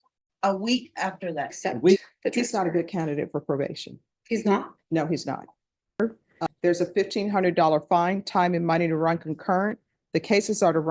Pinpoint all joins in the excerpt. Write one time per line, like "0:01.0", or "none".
0:02.0
0:06.0